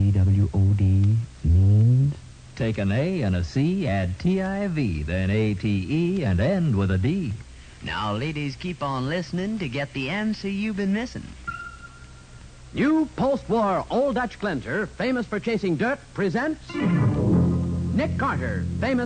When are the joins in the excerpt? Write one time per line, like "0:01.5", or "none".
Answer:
none

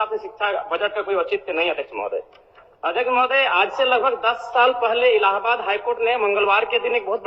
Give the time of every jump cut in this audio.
none

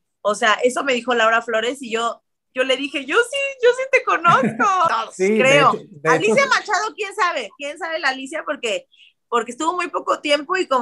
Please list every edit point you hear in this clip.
0:04.9

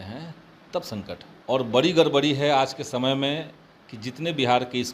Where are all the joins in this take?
0:01.3

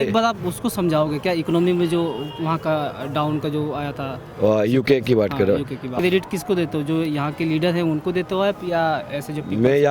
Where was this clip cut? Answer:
0:05.9

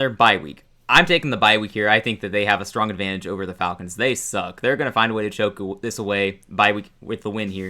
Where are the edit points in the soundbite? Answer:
none

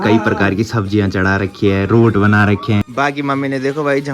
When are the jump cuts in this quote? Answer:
0:02.8

